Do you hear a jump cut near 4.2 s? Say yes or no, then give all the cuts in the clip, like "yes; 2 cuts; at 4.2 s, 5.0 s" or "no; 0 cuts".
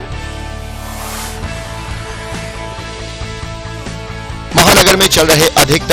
yes; 1 cut; at 4.2 s